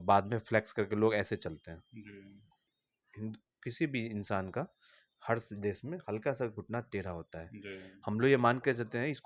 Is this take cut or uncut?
cut